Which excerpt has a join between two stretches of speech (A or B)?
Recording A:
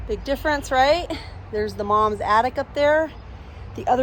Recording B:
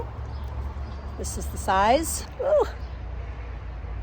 B